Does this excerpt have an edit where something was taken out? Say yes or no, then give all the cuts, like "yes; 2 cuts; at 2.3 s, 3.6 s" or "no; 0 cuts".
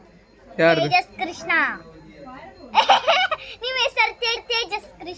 no; 0 cuts